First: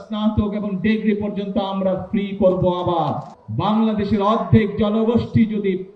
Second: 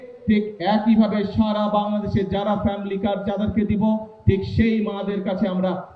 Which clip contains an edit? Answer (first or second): first